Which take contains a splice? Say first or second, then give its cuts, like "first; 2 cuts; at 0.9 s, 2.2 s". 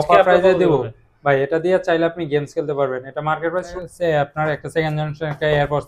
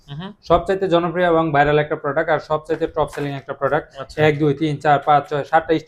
first; 1 cut; at 3.7 s